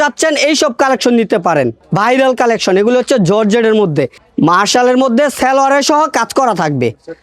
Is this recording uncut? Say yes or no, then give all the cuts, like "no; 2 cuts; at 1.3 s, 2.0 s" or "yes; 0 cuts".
no; 2 cuts; at 1.8 s, 4.2 s